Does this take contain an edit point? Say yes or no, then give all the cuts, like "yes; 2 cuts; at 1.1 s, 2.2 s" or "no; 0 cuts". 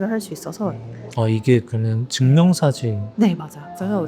yes; 1 cut; at 1.0 s